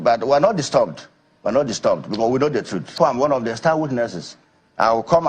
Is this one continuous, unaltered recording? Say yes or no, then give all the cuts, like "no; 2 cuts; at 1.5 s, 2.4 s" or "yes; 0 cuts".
no; 1 cut; at 2.9 s